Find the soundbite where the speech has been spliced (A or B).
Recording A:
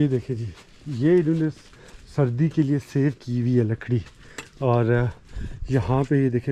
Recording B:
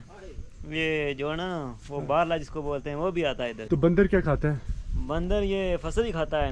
B